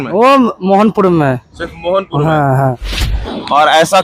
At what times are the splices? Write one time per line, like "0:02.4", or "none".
0:02.8